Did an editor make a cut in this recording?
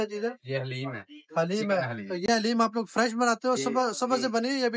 no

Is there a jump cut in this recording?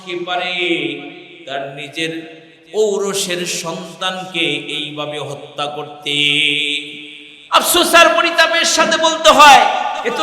no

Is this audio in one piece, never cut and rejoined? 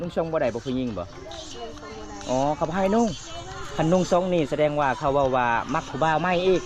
yes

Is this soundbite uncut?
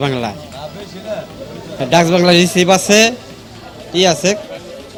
yes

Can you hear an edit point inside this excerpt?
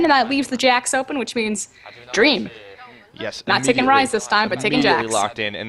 no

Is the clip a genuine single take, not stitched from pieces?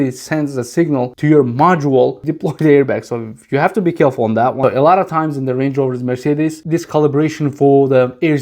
no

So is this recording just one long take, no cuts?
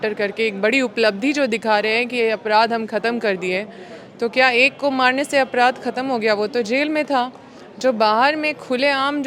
yes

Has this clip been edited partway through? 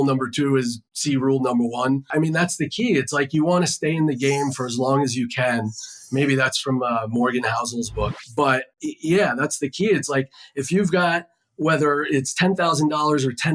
yes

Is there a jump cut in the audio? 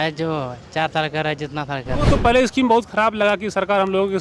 yes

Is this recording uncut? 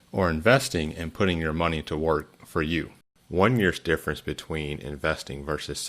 no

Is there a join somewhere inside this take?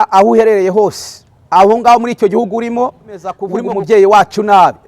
yes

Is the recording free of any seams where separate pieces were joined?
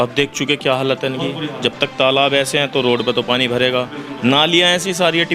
yes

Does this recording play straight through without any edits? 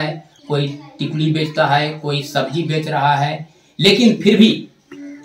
yes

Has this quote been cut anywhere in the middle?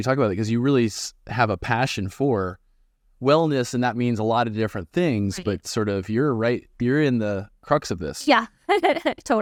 no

